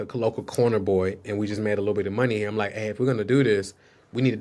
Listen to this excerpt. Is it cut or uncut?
uncut